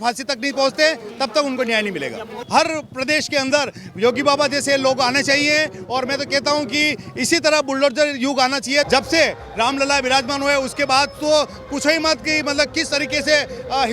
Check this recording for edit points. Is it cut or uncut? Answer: cut